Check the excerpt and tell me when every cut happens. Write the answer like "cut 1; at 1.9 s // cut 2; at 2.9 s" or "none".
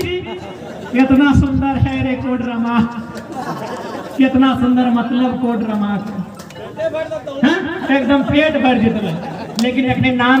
none